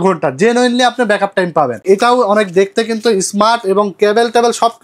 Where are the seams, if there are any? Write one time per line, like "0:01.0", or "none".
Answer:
0:01.8